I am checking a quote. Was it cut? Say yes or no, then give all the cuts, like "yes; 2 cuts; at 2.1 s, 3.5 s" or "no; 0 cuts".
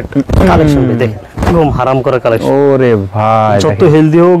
no; 0 cuts